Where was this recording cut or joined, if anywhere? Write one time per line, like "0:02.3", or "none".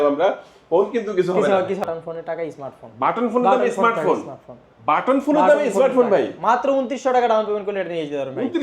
0:01.8